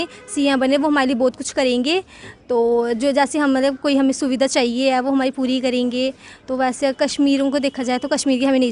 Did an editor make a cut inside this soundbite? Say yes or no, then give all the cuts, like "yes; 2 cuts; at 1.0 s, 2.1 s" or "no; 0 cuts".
no; 0 cuts